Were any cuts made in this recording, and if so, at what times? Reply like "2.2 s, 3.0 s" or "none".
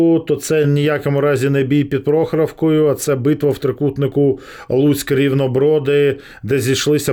none